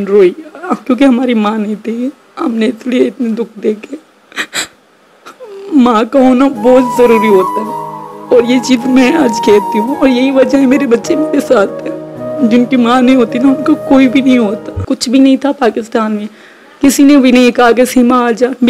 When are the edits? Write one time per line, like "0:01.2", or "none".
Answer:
0:14.8